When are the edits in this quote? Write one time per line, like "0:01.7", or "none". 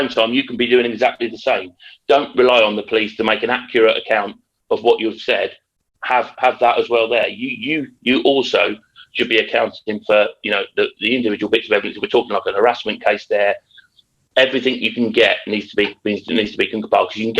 none